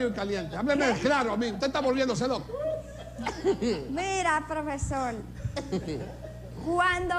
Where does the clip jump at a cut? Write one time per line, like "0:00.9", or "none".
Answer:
0:02.4